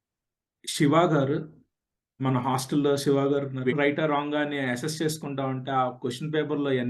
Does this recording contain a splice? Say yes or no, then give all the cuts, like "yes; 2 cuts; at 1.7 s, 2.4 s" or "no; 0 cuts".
yes; 1 cut; at 3.7 s